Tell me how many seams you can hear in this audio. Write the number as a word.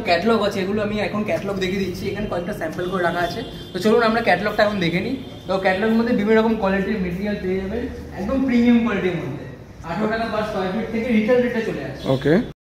zero